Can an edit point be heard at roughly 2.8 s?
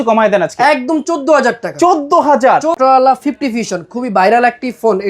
yes; 1 cut; at 2.8 s

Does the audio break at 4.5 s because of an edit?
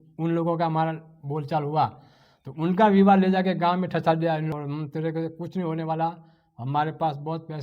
yes; 1 cut; at 4.5 s

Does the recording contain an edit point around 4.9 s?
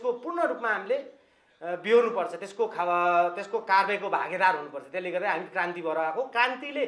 no; 0 cuts

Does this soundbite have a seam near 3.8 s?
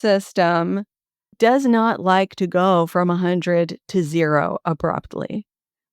no; 1 cut; at 1.3 s

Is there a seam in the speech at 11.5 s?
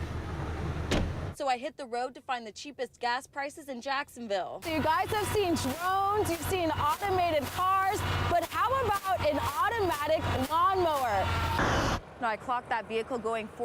yes; 2 cuts; at 4.6 s, 11.5 s

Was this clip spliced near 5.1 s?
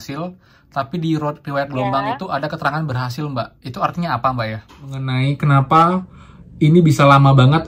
yes; 1 cut; at 5.1 s

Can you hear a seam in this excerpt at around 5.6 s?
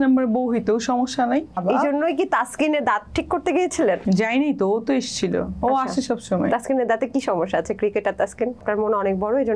no; 3 cuts; at 1.6 s, 4.0 s, 8.6 s

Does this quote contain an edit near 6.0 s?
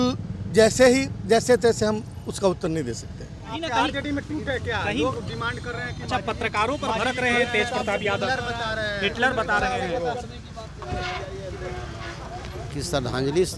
no; 2 cuts; at 3.6 s, 12.6 s

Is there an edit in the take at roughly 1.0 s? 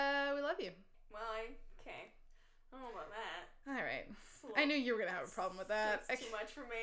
yes; 1 cut; at 1.0 s

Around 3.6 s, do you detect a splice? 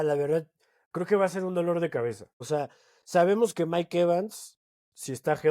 no; 1 cut; at 2.4 s

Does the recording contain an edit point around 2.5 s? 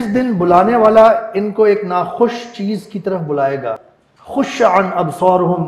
no; 1 cut; at 3.9 s

